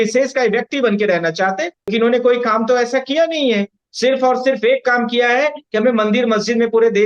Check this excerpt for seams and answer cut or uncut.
cut